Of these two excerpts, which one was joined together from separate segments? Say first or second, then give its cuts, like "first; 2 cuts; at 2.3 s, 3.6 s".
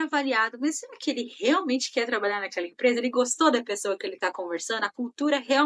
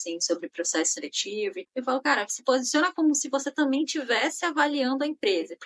second; 1 cut; at 1.6 s